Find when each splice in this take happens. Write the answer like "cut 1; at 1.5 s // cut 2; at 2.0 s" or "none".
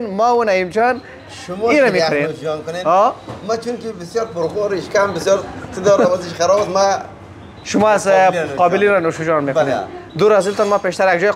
none